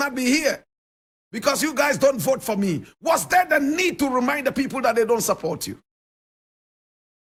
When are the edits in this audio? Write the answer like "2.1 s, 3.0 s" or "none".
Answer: none